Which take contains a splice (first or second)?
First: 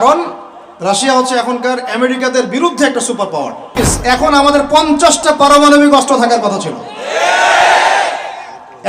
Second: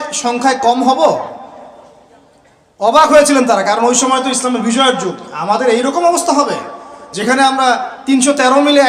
first